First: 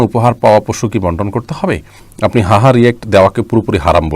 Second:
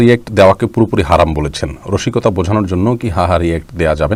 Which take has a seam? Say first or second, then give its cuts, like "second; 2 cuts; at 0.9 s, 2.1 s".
first; 1 cut; at 1.9 s